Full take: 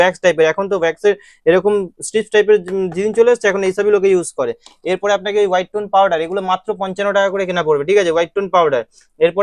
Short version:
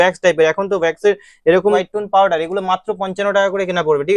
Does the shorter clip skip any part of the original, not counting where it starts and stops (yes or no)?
yes